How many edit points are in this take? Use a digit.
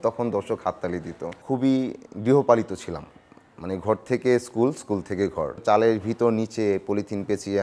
2